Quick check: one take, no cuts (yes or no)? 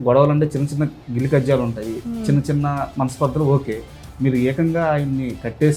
yes